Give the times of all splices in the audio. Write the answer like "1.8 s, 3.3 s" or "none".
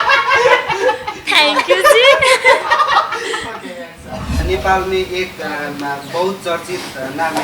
4.4 s